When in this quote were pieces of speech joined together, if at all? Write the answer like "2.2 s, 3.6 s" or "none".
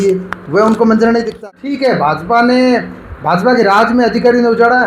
1.3 s